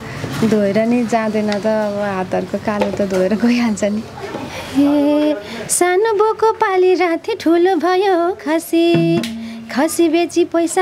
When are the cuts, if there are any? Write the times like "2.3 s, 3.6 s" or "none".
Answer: 4.6 s